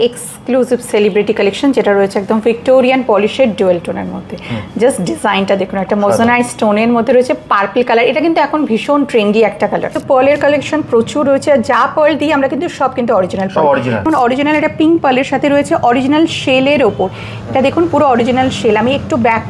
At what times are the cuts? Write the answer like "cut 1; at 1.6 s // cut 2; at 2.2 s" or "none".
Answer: cut 1; at 10.0 s // cut 2; at 14.1 s